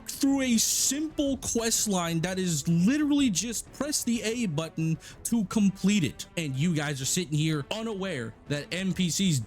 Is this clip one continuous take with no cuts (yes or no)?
no